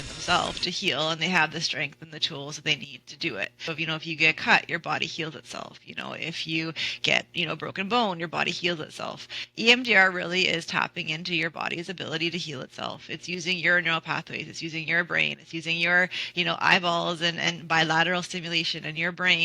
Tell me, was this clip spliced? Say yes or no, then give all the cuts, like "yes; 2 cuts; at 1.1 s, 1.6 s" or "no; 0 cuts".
yes; 1 cut; at 3.6 s